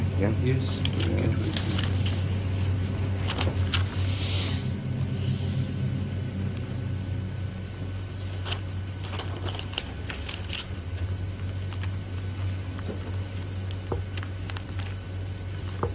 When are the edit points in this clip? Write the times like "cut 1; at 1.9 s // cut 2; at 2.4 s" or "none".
none